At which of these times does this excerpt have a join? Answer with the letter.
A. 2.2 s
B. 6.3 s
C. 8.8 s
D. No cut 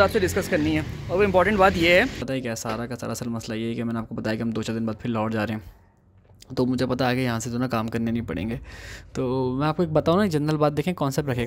A